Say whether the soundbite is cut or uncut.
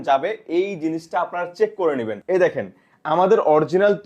cut